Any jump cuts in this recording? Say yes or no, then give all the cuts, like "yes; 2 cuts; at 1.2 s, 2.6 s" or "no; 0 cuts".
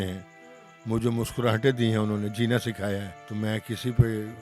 yes; 1 cut; at 3.2 s